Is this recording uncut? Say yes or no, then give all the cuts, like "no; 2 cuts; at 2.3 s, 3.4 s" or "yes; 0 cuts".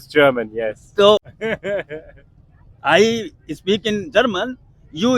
no; 1 cut; at 1.3 s